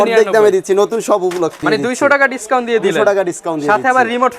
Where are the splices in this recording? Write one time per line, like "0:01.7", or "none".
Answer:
0:01.6